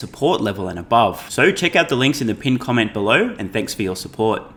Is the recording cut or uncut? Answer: uncut